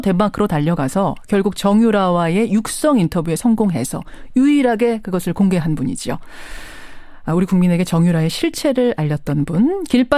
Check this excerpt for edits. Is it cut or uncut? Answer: uncut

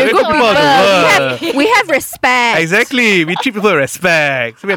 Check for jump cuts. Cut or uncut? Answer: uncut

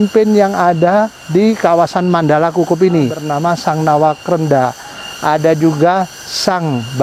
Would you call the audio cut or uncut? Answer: cut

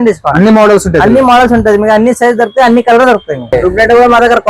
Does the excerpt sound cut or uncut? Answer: cut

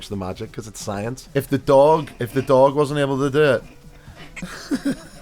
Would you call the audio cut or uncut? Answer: cut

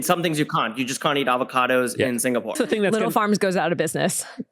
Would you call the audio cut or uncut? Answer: cut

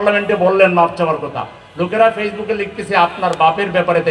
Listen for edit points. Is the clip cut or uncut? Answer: uncut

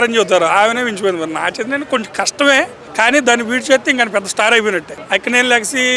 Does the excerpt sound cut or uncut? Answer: cut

